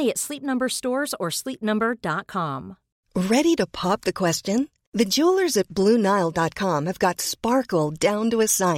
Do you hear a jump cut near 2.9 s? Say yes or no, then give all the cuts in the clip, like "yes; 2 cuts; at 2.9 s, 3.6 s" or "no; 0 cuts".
yes; 1 cut; at 2.9 s